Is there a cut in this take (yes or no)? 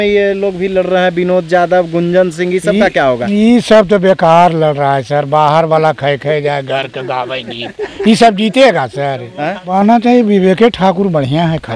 yes